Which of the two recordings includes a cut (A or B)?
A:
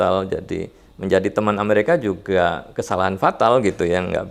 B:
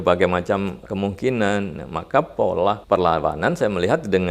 B